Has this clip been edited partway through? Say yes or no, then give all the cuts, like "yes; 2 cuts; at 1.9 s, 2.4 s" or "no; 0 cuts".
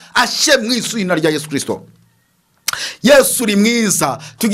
no; 0 cuts